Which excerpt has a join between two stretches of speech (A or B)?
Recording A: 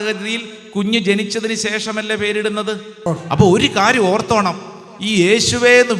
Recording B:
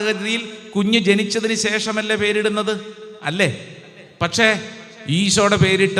A